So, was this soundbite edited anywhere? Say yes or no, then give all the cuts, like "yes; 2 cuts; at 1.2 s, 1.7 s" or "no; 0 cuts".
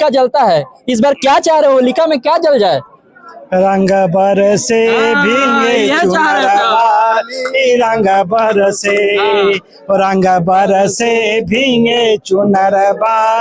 no; 0 cuts